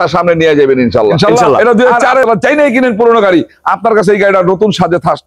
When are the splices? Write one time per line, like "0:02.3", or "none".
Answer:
0:02.2